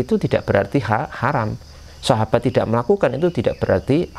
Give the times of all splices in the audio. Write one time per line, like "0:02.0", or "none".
none